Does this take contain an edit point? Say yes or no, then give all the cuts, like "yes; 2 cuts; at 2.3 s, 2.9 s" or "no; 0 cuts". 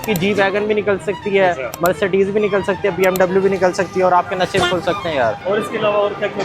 yes; 1 cut; at 5.4 s